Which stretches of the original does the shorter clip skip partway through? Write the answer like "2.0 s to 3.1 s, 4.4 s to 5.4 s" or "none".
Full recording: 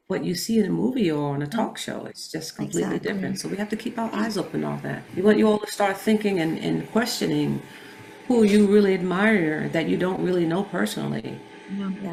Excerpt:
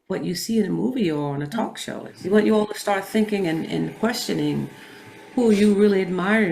2.1 s to 5.0 s